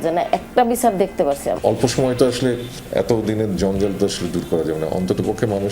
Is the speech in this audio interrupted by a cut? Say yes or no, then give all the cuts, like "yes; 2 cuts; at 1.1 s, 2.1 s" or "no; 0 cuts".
yes; 1 cut; at 1.6 s